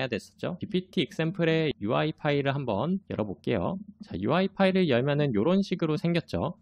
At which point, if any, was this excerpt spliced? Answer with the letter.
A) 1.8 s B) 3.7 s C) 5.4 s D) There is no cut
D